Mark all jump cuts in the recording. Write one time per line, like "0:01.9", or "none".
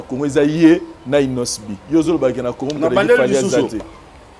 none